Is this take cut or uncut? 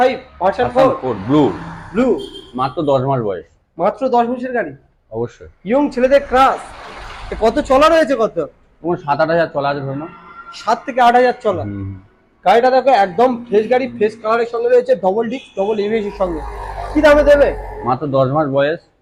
uncut